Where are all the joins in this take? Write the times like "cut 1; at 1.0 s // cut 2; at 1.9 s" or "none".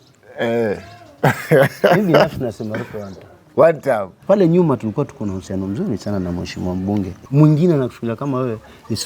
cut 1; at 4.2 s // cut 2; at 7.2 s